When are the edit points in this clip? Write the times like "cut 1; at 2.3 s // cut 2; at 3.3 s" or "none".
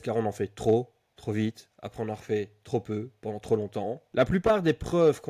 cut 1; at 4.0 s